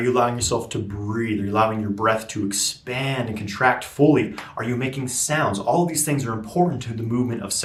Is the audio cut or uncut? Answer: uncut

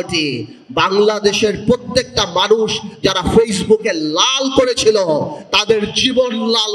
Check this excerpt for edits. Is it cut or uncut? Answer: uncut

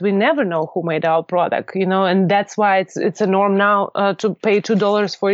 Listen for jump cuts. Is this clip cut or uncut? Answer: uncut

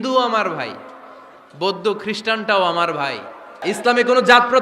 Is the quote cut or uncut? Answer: cut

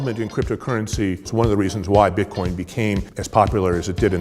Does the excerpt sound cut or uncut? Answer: cut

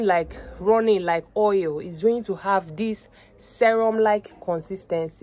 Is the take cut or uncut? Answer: uncut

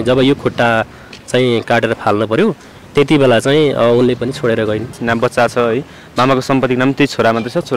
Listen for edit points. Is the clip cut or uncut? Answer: cut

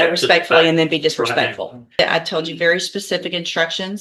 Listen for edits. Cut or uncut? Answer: cut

